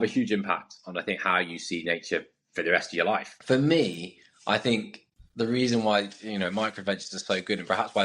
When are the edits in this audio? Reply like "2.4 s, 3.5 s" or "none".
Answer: 3.3 s